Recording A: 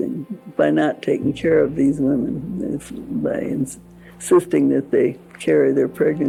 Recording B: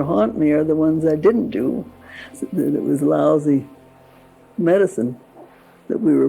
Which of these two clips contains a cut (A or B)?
B